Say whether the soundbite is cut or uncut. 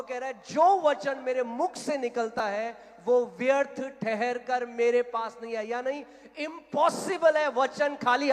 uncut